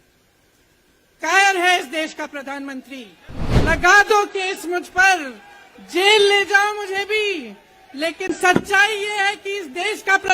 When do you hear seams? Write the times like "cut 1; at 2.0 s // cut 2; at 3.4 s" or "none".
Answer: cut 1; at 3.3 s